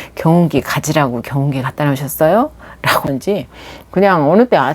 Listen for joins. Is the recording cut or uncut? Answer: cut